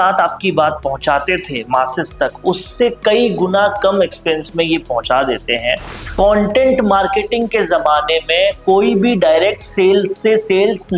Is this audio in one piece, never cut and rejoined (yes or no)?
no